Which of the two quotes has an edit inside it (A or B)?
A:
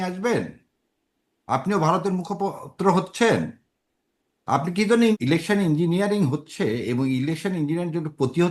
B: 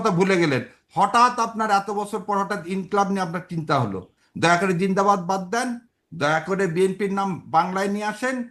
A